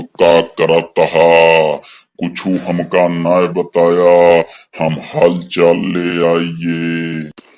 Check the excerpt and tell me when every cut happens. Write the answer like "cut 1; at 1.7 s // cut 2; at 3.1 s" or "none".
none